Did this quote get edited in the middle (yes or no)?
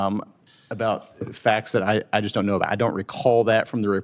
no